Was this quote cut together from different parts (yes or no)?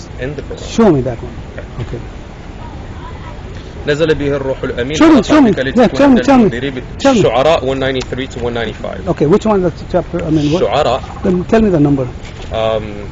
no